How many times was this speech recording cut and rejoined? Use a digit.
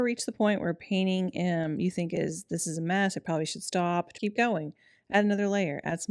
1